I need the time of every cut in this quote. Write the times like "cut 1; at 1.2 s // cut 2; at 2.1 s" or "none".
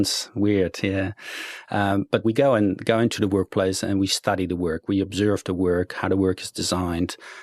none